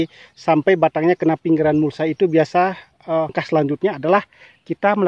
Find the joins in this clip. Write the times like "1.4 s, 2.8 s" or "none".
3.4 s